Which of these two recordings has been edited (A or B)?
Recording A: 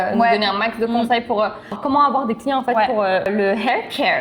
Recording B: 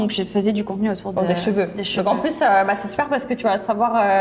A